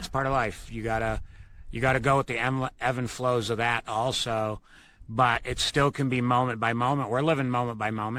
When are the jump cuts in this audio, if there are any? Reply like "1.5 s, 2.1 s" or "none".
none